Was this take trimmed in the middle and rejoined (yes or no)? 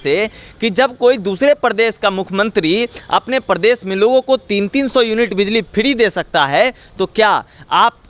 no